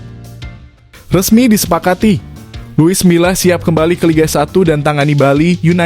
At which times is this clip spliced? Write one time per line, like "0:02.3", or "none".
0:01.1